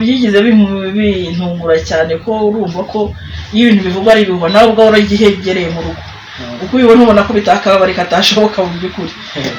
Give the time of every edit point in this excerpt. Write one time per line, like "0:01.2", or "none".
none